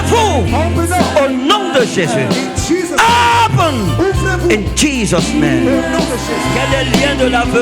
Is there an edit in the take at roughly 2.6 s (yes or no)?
no